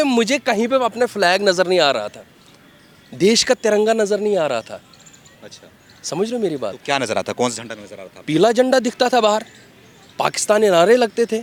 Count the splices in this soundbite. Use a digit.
0